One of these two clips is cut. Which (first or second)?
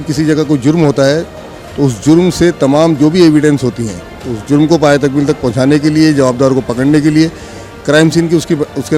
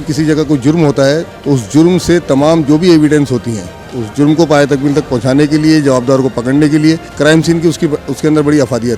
second